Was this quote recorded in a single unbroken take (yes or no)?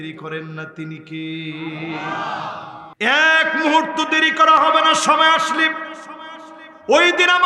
no